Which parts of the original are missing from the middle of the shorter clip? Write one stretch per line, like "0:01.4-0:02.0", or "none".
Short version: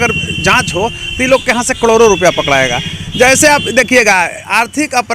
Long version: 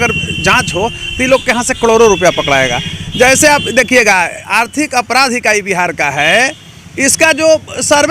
none